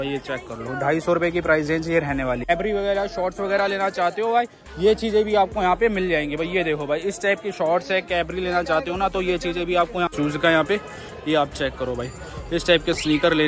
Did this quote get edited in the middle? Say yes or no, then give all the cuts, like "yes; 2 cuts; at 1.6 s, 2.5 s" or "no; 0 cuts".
yes; 2 cuts; at 2.5 s, 10.1 s